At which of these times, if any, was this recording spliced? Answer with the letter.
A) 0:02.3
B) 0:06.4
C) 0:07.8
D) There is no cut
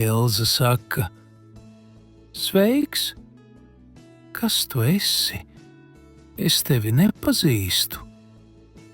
C